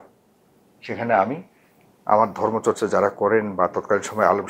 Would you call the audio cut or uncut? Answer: uncut